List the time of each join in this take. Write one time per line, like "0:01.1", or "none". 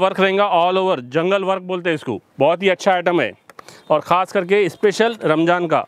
none